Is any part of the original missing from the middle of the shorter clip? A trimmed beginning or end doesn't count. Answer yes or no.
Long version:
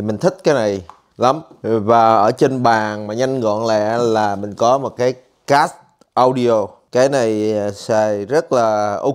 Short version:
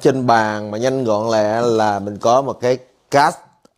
no